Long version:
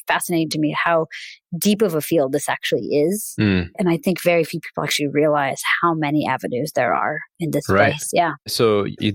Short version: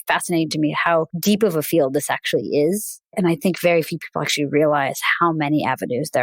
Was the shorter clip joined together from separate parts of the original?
yes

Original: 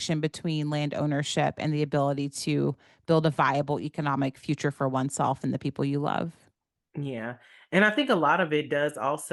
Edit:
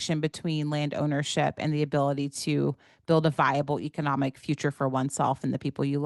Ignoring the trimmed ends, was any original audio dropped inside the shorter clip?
no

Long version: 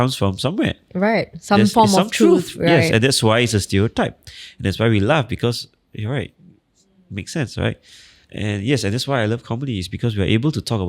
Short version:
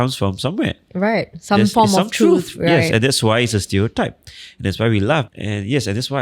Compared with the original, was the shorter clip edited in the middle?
yes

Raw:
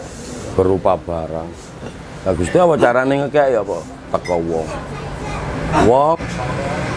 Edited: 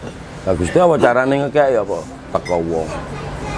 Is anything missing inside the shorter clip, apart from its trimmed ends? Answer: no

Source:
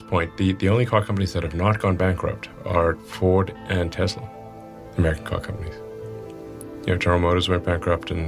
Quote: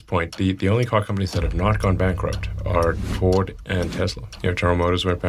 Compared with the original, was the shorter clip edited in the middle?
yes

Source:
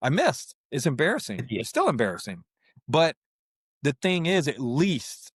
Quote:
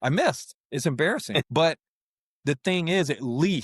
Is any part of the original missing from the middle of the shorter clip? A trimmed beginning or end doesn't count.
yes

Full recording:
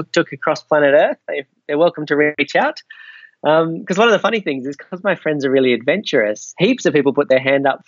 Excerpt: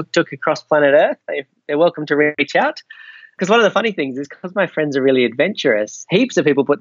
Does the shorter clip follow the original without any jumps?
no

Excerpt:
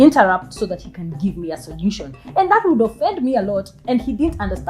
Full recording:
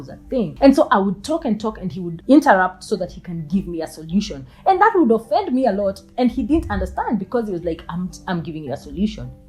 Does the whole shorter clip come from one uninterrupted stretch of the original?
yes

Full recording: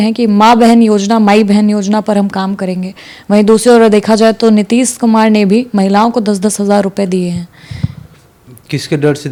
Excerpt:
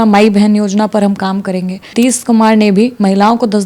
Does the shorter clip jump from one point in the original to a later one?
yes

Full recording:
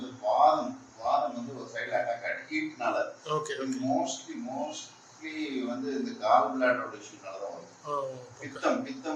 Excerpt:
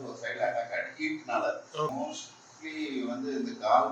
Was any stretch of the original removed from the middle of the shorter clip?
yes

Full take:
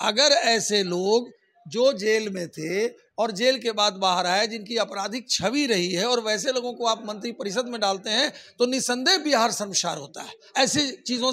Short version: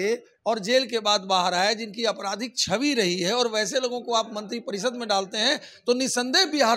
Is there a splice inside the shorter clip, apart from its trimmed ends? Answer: no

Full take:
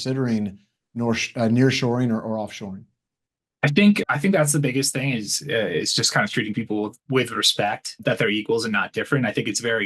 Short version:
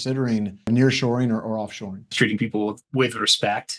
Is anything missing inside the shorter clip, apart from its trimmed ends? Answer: yes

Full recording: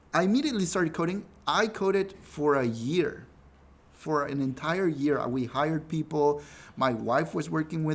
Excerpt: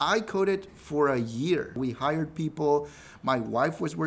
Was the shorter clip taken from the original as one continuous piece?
no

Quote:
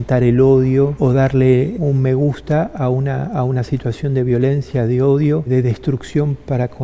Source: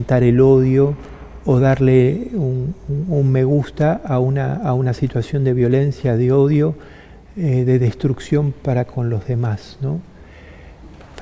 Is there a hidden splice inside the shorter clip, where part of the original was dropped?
yes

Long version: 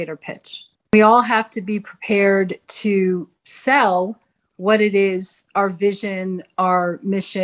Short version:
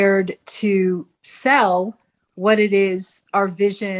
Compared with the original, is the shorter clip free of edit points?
yes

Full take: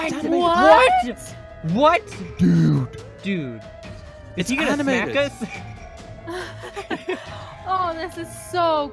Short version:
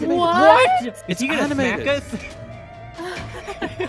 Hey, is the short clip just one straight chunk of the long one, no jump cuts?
no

